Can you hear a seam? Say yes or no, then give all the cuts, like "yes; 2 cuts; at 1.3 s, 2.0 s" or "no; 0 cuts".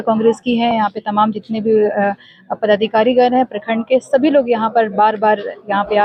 no; 0 cuts